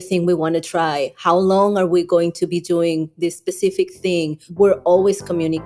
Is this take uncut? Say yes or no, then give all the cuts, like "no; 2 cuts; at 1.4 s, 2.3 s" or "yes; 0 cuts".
no; 1 cut; at 4.5 s